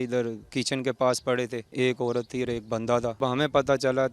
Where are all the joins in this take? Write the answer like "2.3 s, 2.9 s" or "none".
1.6 s, 3.2 s